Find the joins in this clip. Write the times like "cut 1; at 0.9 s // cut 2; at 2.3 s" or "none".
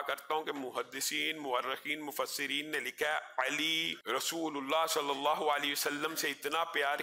cut 1; at 3.9 s